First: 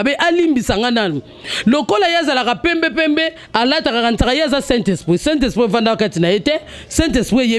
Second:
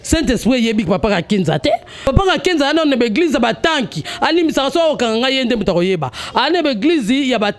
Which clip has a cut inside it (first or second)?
second